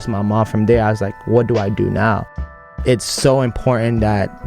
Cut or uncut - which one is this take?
cut